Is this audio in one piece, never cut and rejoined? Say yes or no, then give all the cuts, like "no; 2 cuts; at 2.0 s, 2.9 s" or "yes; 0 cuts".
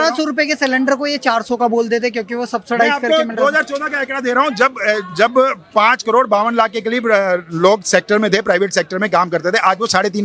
yes; 0 cuts